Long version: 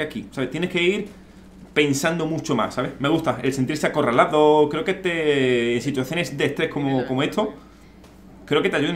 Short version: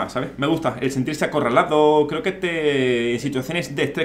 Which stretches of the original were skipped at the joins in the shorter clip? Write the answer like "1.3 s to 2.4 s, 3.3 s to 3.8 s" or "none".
none

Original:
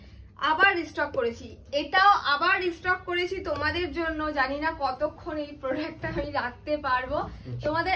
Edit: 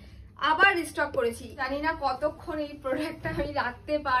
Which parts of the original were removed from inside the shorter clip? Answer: 1.6 s to 4.4 s

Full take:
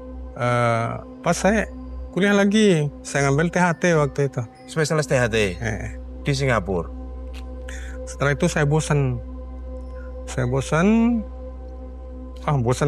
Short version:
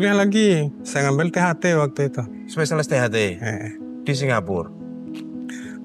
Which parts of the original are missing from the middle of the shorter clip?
none

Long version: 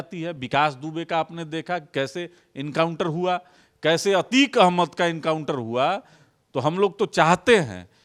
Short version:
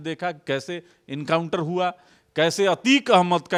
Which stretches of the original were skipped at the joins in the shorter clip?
none

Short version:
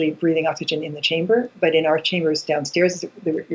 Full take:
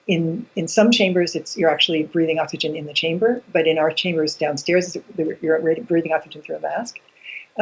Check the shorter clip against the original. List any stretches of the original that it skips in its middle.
none

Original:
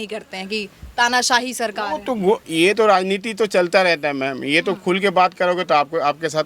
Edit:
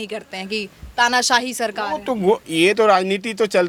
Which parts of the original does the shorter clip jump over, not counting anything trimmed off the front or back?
none

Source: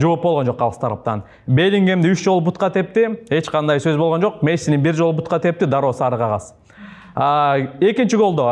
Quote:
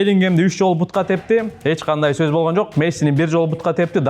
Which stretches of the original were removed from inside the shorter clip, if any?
none

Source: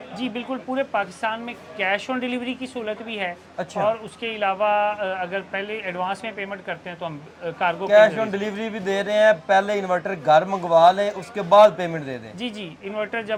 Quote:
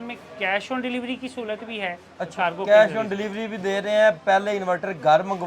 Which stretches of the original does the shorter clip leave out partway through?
3.7 s to 7.5 s

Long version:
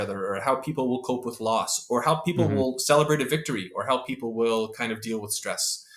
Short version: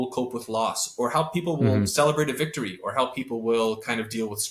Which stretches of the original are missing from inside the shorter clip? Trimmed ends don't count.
none

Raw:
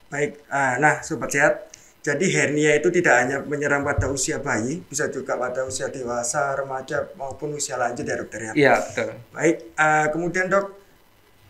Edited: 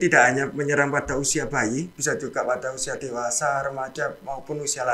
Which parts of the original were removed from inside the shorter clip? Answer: none

